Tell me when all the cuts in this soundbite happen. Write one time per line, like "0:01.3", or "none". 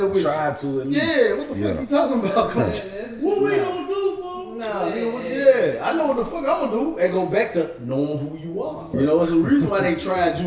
0:08.8